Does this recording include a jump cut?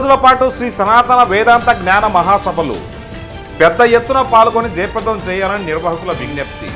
no; 0 cuts

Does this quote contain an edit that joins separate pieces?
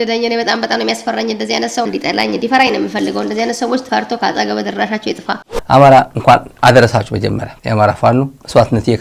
yes; 2 cuts; at 1.8 s, 5.5 s

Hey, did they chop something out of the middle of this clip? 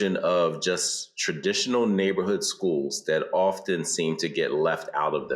no; 0 cuts

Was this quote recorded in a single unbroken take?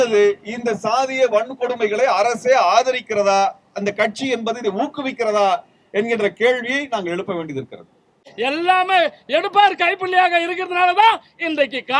no; 1 cut; at 8.3 s

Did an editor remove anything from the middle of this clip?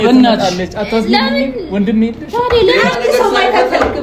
yes; 1 cut; at 2.7 s

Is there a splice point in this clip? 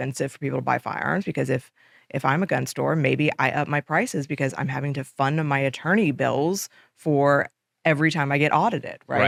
no; 0 cuts

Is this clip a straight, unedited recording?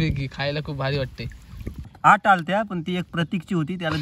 no; 1 cut; at 1.9 s

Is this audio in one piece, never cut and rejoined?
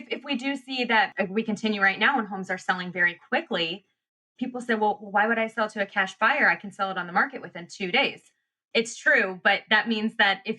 no; 3 cuts; at 1.1 s, 4.2 s, 8.6 s

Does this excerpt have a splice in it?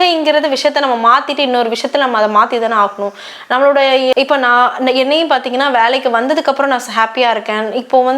yes; 1 cut; at 4.1 s

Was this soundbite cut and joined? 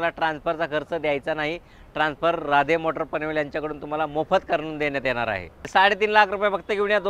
yes; 1 cut; at 5.7 s

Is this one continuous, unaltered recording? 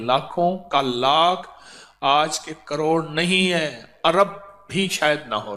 yes; 0 cuts

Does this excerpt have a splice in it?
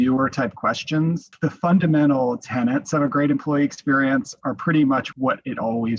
yes; 2 cuts; at 1.3 s, 5.1 s

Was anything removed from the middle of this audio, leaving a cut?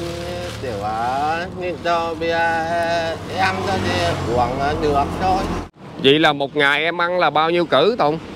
yes; 1 cut; at 5.6 s

